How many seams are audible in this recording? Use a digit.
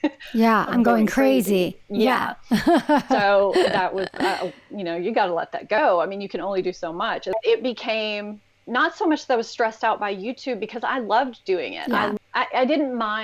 2